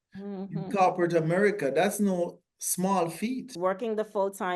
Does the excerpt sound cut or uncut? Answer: cut